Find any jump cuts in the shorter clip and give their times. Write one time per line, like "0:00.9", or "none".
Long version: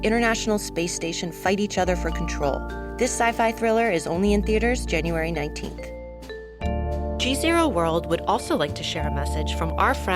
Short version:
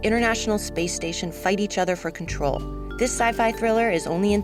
none